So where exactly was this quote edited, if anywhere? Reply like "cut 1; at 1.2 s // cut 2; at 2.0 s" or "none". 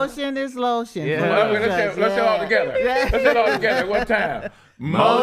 none